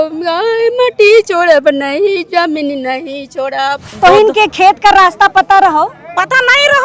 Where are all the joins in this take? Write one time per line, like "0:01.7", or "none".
0:03.9